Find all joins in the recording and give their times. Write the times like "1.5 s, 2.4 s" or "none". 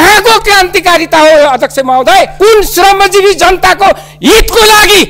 2.3 s